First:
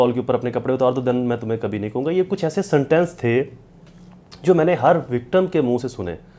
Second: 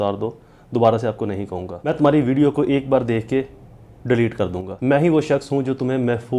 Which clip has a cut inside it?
second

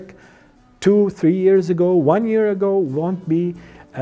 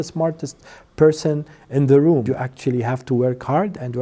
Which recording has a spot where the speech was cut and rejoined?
second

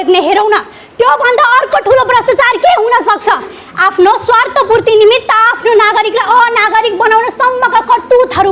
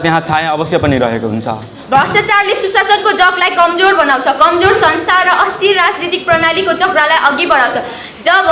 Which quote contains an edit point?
second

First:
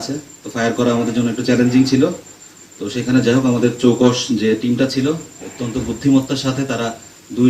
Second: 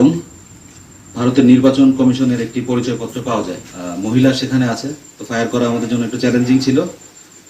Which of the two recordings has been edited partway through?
second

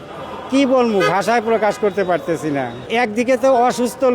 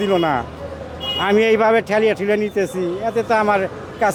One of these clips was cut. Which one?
first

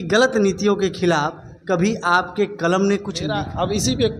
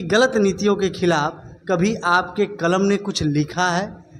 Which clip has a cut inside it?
first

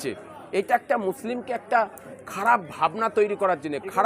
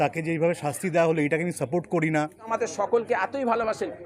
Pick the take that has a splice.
second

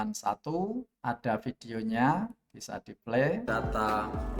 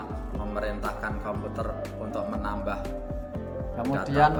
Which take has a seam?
first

